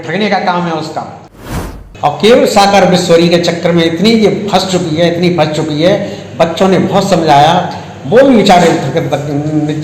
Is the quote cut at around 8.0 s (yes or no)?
no